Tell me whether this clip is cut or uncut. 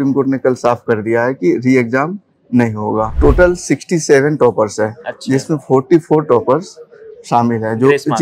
cut